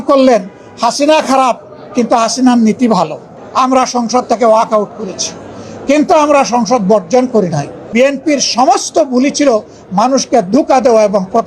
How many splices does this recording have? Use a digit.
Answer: 2